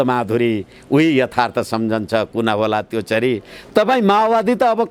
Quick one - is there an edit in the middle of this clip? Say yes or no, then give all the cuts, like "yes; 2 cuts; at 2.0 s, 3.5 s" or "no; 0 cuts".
no; 0 cuts